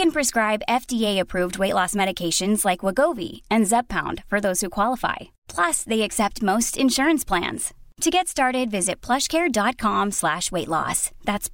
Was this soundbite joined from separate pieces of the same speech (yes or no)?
no